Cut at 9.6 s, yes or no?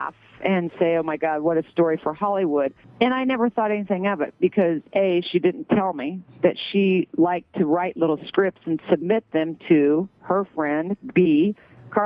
no